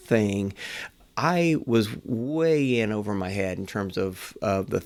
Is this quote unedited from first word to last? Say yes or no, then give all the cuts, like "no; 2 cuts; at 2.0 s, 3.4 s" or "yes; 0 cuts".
yes; 0 cuts